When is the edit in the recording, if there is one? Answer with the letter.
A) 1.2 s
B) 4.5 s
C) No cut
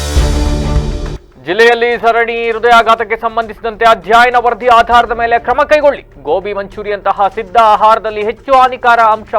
A